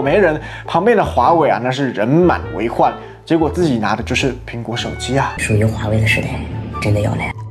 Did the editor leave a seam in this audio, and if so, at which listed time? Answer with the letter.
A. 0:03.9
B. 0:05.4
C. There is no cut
B